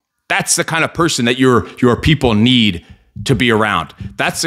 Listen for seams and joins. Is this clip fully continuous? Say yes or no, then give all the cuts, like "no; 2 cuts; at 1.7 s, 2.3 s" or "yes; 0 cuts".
yes; 0 cuts